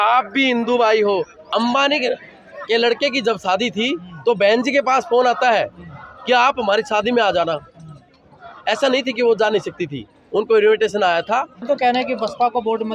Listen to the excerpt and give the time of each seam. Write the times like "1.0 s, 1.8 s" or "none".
1.4 s, 11.6 s